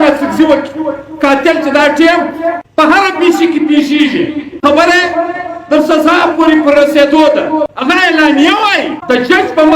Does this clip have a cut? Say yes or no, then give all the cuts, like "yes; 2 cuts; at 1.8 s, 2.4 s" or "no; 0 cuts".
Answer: yes; 4 cuts; at 2.6 s, 4.4 s, 7.7 s, 9.0 s